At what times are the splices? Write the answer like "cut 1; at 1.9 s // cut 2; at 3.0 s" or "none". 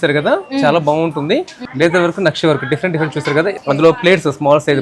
cut 1; at 1.6 s // cut 2; at 3.6 s

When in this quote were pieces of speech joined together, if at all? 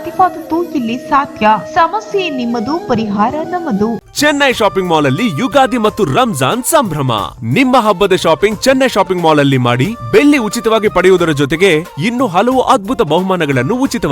cut 1; at 4.0 s

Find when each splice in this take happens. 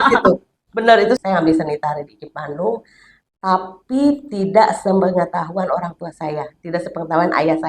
cut 1; at 1.2 s

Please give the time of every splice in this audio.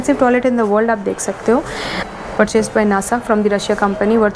cut 1; at 2.0 s

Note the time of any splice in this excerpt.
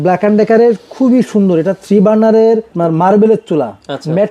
cut 1; at 2.7 s

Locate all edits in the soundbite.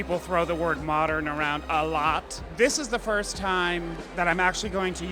none

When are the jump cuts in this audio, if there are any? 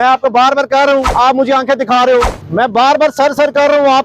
cut 1; at 1.1 s // cut 2; at 2.4 s

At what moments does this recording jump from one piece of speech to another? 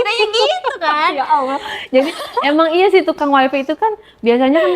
none

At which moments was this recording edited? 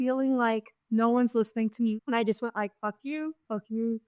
cut 1; at 1.9 s

